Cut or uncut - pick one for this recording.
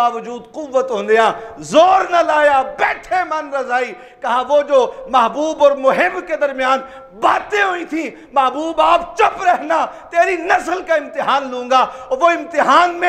uncut